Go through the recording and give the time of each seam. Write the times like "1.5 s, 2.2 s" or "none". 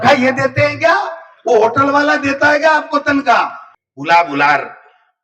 3.6 s